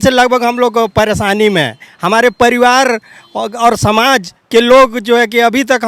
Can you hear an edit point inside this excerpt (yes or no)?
no